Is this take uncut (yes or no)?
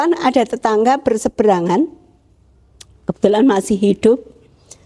yes